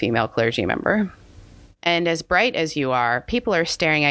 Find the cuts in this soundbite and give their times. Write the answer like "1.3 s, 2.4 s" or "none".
1.7 s

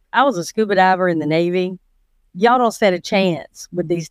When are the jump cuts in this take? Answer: none

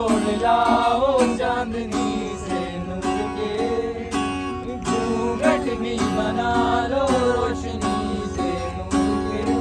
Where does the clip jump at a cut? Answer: none

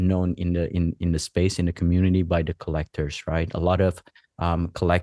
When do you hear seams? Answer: none

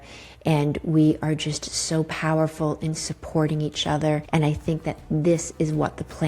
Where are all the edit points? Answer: 4.2 s

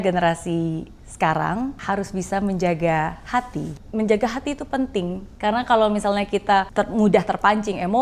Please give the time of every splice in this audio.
1.8 s, 3.8 s, 5.2 s, 6.7 s

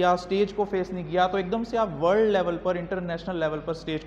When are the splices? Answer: none

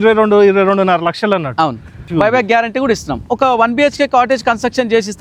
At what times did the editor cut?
2.1 s, 3.3 s

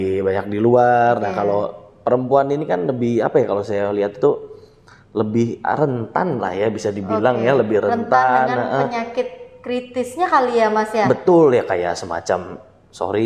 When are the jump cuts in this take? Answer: none

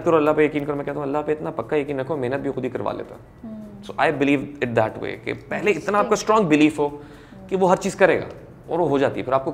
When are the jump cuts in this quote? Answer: none

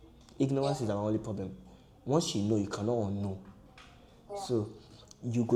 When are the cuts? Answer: none

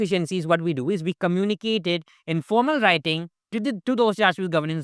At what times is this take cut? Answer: none

